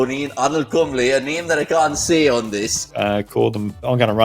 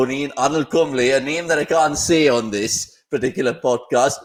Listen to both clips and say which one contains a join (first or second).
first